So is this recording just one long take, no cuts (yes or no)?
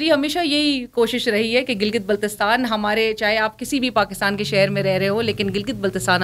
yes